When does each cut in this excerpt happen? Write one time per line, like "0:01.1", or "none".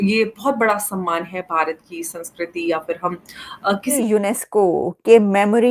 0:04.0